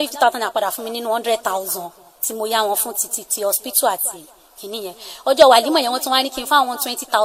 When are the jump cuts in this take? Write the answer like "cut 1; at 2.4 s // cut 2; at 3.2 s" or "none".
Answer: none